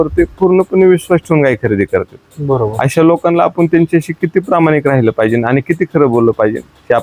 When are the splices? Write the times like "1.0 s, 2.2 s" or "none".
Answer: none